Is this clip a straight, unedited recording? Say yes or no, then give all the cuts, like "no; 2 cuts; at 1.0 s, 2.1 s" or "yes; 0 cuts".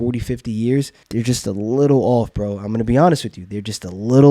no; 1 cut; at 1.0 s